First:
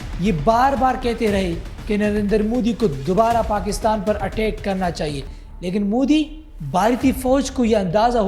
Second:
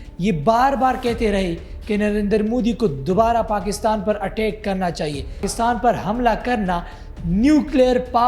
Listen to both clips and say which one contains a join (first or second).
second